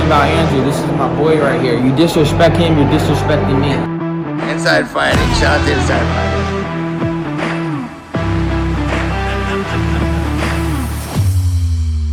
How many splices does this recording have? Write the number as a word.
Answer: zero